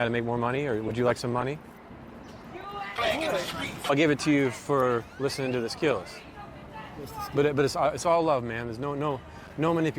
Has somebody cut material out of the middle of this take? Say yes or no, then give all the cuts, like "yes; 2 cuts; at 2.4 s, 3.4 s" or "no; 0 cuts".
yes; 1 cut; at 3.9 s